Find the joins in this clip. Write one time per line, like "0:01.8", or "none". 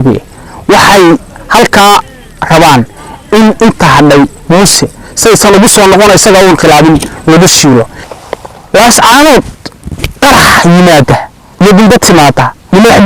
0:08.0